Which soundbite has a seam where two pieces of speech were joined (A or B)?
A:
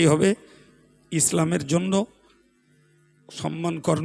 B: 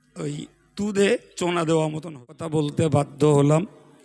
B